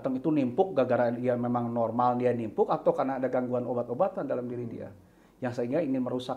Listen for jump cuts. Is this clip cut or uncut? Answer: uncut